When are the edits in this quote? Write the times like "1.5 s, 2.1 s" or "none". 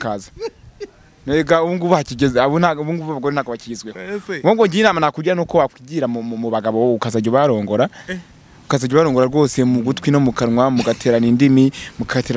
none